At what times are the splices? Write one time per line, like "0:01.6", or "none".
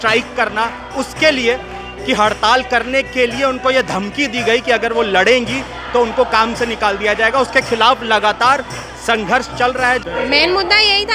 0:10.0